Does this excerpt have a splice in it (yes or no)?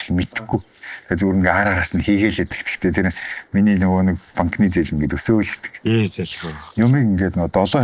yes